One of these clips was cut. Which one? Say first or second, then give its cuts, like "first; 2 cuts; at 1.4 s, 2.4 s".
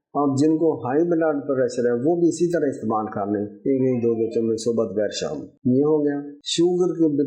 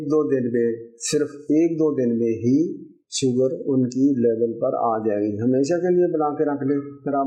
first; 1 cut; at 6.4 s